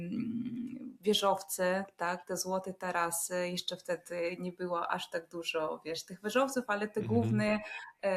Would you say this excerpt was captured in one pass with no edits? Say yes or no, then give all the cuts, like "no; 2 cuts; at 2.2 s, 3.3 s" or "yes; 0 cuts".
yes; 0 cuts